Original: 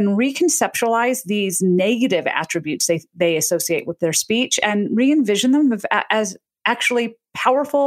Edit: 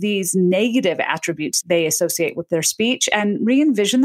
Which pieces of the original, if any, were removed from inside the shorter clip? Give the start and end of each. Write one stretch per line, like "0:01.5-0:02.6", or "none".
0:02.8-0:03.0